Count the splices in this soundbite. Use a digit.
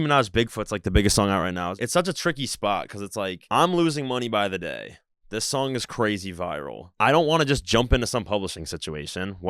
1